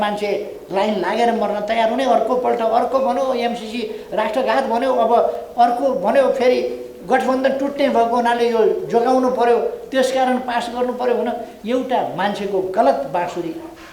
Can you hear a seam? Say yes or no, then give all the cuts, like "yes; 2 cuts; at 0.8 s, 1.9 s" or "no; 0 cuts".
yes; 1 cut; at 11.5 s